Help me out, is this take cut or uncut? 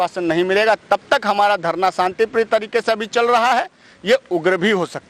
uncut